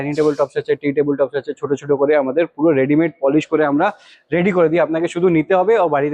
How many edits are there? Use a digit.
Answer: 0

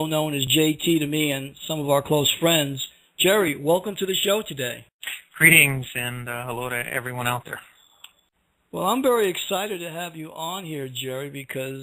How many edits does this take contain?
1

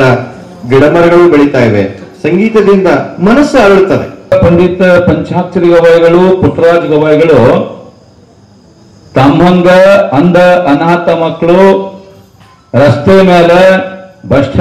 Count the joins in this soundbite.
1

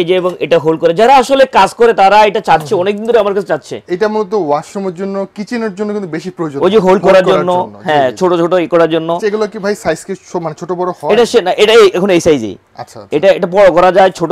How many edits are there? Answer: 0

